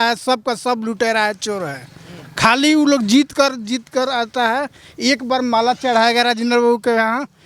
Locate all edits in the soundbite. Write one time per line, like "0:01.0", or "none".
none